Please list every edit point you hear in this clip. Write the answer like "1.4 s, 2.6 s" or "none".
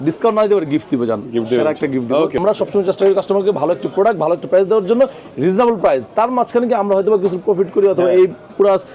2.4 s